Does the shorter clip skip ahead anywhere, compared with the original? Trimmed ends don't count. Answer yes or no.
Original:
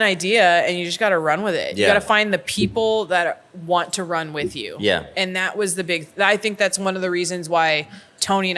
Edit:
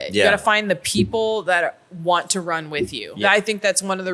yes